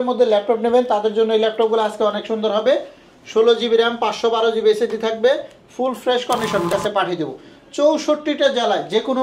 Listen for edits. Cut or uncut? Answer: cut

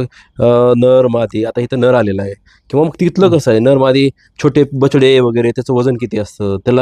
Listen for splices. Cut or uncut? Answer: uncut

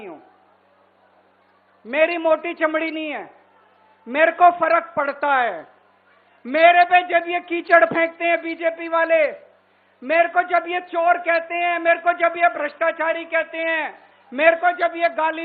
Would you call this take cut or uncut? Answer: uncut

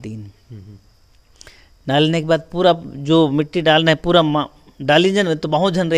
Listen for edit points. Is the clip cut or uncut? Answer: uncut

